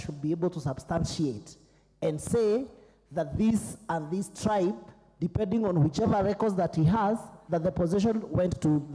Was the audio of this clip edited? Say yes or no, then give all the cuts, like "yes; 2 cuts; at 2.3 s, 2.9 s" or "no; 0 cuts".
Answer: no; 0 cuts